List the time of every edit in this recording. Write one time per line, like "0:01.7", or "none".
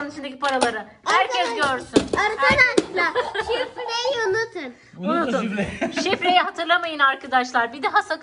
none